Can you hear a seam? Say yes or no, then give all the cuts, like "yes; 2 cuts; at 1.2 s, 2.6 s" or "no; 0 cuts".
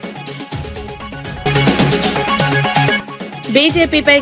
no; 0 cuts